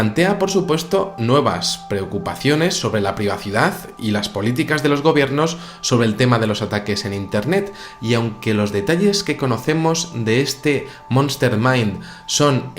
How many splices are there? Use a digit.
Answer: 1